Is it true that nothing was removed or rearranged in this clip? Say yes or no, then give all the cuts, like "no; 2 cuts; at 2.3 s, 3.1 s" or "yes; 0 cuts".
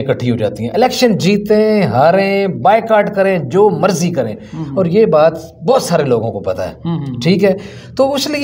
yes; 0 cuts